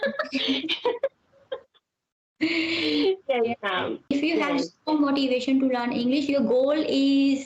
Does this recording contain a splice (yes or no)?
yes